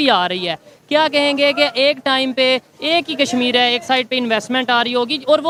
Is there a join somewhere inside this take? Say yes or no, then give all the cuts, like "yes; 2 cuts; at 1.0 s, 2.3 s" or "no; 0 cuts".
no; 0 cuts